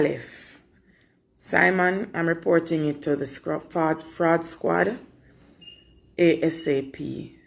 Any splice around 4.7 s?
yes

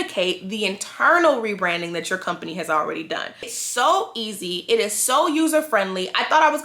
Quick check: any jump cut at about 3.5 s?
yes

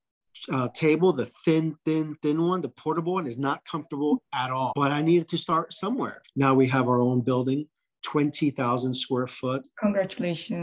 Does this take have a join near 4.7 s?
yes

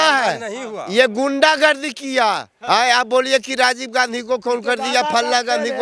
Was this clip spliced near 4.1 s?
no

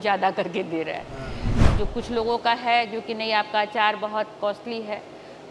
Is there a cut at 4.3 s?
no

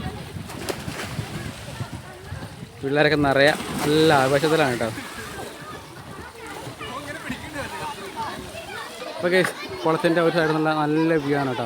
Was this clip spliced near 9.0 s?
yes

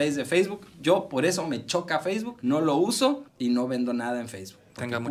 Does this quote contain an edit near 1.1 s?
no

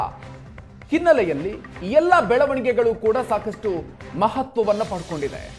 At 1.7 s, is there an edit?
no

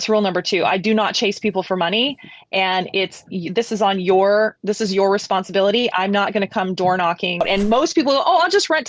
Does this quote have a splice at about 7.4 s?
yes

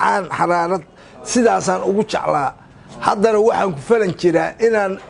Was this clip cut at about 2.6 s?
no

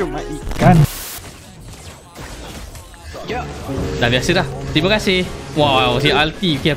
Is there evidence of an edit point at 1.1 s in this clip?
yes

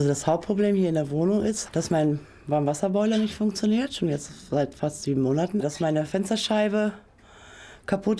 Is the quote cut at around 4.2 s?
no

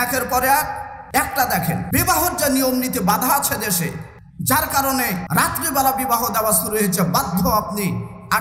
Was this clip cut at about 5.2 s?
yes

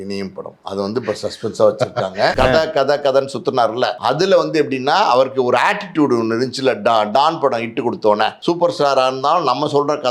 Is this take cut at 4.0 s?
yes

